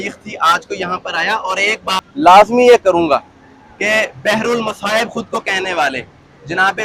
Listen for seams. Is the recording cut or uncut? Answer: cut